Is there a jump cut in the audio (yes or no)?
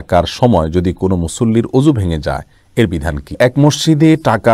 yes